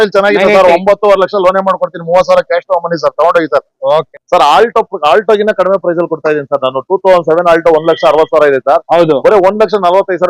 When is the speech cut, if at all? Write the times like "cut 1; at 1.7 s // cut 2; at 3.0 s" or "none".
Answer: cut 1; at 4.2 s